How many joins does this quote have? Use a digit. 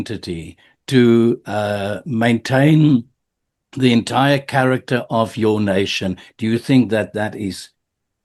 0